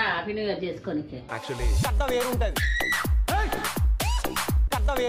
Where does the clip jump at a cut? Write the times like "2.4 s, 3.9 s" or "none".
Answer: none